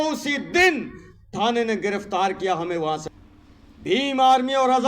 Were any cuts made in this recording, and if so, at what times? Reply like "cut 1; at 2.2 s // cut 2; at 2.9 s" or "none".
cut 1; at 3.0 s